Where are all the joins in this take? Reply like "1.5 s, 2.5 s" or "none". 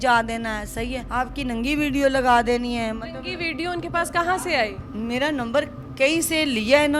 1.0 s, 4.9 s